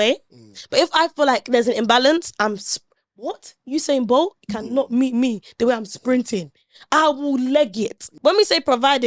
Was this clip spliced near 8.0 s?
yes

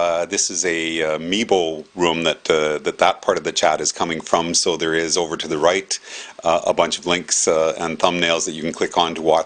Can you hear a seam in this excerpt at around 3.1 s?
no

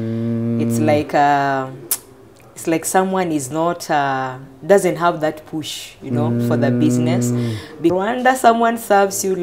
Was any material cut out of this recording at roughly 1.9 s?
no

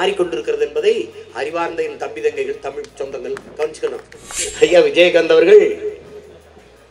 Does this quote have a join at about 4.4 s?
yes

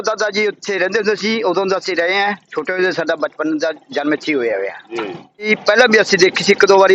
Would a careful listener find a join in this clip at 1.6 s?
no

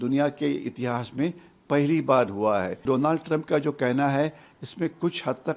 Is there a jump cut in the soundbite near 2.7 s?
yes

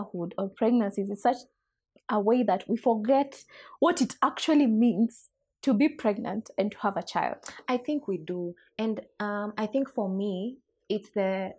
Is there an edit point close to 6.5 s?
no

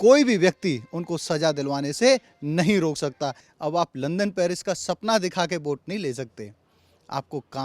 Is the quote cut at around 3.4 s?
yes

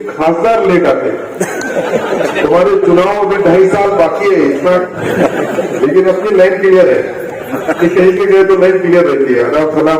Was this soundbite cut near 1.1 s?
no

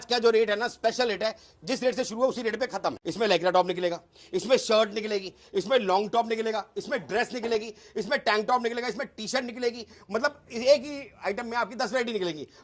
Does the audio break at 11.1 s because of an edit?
no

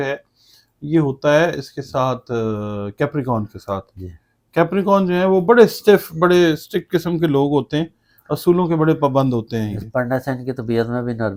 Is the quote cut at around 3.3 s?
no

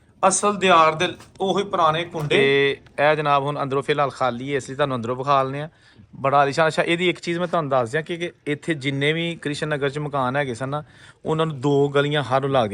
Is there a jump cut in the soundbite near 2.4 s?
yes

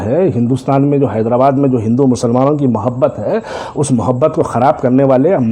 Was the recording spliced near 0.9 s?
no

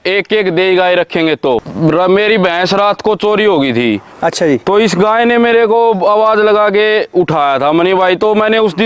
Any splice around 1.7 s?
yes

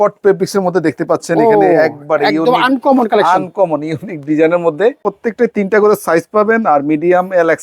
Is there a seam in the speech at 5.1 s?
yes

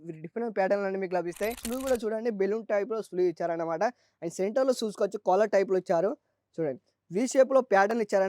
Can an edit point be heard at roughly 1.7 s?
yes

